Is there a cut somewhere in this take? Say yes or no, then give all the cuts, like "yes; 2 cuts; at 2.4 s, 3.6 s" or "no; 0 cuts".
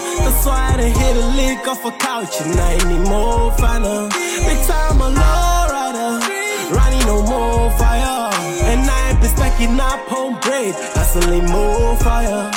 no; 0 cuts